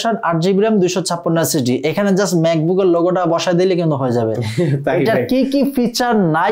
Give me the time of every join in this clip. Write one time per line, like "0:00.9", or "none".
none